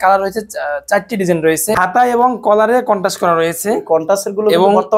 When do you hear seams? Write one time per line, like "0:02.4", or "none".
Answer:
0:01.8